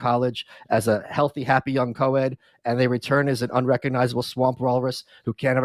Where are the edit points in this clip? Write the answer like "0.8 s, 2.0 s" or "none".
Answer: none